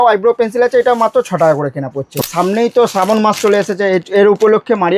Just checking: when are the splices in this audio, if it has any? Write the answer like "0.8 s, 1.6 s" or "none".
2.1 s